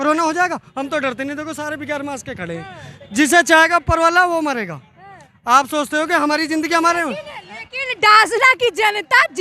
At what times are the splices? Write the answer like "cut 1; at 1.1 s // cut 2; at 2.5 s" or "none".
none